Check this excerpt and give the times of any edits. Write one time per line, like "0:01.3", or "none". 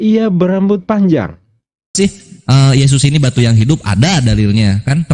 0:02.0